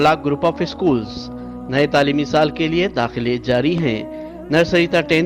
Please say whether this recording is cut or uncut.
uncut